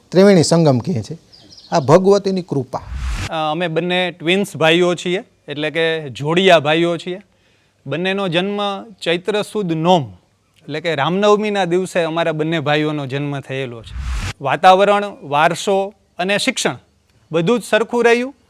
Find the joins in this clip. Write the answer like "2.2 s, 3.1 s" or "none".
3.2 s, 14.3 s